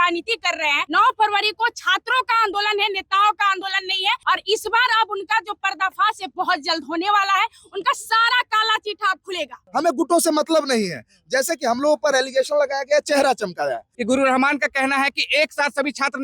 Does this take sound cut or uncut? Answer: cut